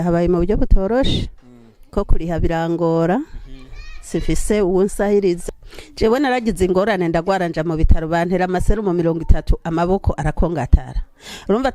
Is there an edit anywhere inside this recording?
yes; 1 cut; at 5.4 s

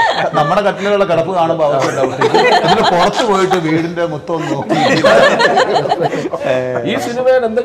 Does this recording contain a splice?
no; 0 cuts

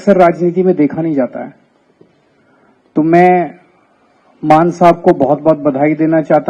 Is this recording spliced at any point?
no; 0 cuts

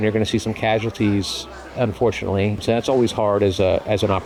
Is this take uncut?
yes; 0 cuts

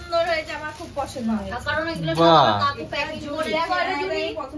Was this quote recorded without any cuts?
yes; 0 cuts

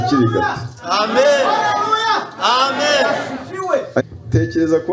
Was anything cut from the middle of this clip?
yes; 1 cut; at 4.0 s

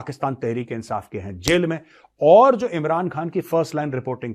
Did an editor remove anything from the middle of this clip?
no; 0 cuts

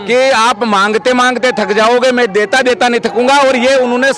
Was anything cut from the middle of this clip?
no; 0 cuts

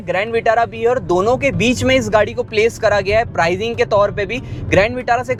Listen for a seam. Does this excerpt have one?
no; 0 cuts

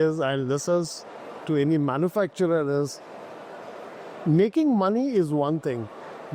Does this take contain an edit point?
no; 0 cuts

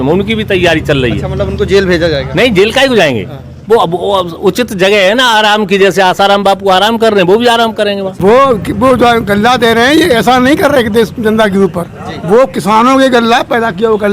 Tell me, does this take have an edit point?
yes; 1 cut; at 8.1 s

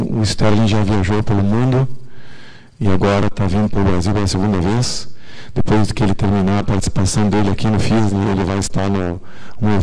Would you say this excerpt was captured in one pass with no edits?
no; 1 cut; at 4.0 s

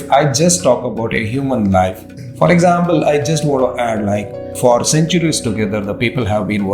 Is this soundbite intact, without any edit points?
no; 2 cuts; at 2.1 s, 4.5 s

